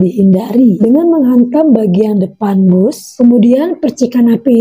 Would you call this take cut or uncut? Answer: cut